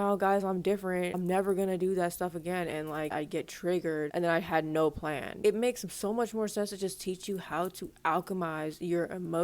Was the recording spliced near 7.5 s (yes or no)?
no